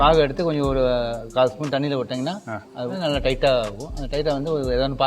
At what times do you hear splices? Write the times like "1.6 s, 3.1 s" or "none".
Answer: 2.9 s